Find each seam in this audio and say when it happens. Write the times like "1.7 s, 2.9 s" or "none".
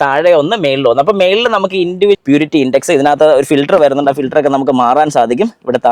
2.2 s